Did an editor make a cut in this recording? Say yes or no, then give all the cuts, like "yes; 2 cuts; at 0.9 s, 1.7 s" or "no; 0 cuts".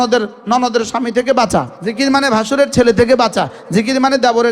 yes; 1 cut; at 1.8 s